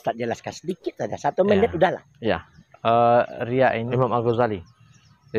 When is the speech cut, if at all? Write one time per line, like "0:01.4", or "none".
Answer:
0:03.9

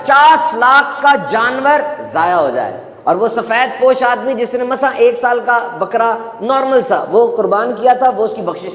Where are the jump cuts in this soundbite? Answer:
none

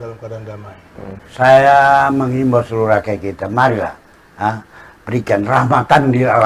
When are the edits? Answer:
0:01.2

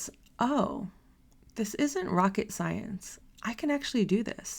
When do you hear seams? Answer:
none

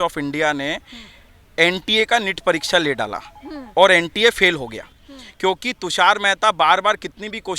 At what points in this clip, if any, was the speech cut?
none

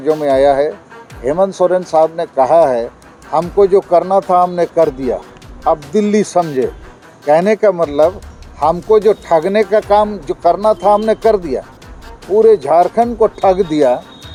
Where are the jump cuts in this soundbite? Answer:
none

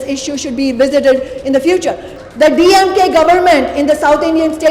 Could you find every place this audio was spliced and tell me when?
0:02.1

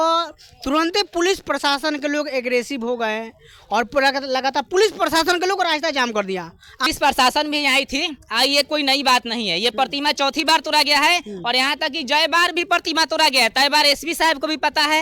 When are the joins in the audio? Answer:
0:06.9

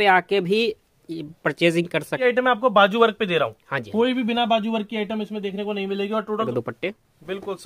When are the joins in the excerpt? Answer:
0:02.2
0:06.5

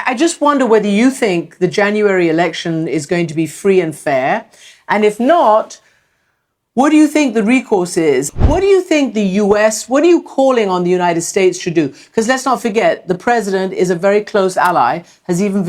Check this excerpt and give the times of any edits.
0:08.3

